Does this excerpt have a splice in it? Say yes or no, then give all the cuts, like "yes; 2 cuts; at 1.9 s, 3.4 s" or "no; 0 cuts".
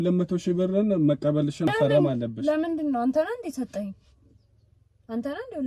yes; 1 cut; at 1.7 s